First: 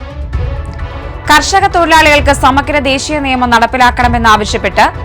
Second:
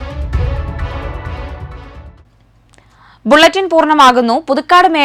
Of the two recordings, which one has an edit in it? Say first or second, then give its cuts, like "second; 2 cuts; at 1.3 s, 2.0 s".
first; 1 cut; at 1.2 s